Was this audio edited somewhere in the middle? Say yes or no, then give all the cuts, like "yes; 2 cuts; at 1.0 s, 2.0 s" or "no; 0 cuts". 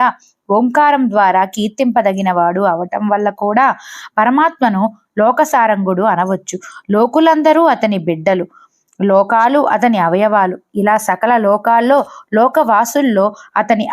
no; 0 cuts